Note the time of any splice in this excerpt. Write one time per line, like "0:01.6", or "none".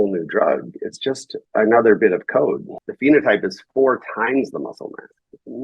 0:02.7